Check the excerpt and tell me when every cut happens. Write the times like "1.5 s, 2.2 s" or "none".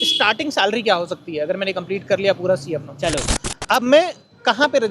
3.4 s